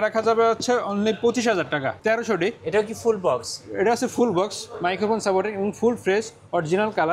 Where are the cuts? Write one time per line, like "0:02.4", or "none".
0:02.0